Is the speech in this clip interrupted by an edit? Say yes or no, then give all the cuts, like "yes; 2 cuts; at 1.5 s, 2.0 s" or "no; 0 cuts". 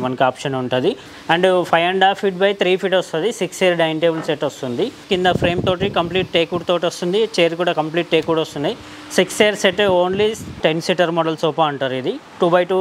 yes; 3 cuts; at 1.1 s, 5.0 s, 10.6 s